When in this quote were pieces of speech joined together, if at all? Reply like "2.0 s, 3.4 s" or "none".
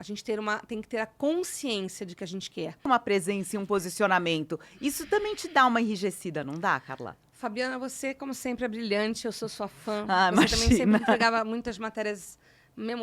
2.9 s